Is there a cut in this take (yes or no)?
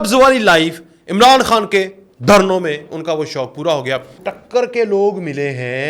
yes